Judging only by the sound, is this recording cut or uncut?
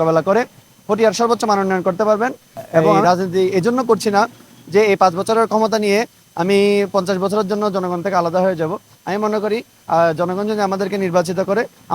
cut